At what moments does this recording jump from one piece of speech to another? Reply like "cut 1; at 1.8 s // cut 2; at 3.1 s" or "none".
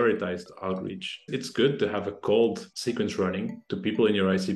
cut 1; at 1.3 s // cut 2; at 2.7 s